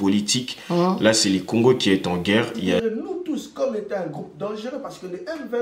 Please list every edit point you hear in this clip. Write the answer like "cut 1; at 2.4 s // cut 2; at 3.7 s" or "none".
cut 1; at 2.8 s